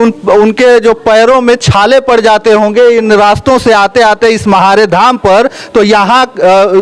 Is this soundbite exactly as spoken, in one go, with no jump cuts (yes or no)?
yes